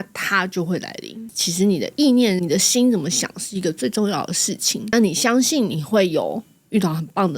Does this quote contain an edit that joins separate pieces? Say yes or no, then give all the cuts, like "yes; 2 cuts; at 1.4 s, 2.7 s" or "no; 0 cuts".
yes; 1 cut; at 1.2 s